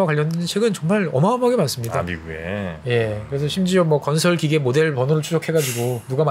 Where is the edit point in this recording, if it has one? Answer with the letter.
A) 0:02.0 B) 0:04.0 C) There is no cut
C